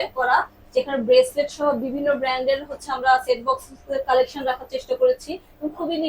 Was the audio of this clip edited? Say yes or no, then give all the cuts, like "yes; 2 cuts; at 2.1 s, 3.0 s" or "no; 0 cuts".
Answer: no; 0 cuts